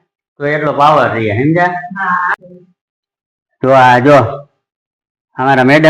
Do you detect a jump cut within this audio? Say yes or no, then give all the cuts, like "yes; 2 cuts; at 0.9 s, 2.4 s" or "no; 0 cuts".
yes; 1 cut; at 2.3 s